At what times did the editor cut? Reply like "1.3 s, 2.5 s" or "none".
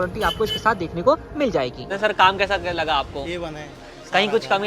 1.6 s